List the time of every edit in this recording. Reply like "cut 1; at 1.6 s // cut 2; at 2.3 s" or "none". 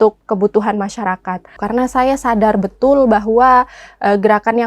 cut 1; at 1.6 s